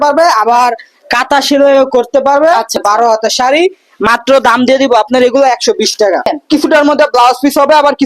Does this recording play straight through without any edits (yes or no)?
no